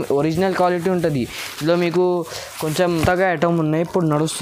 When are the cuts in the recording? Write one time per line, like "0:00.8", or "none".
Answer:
0:03.0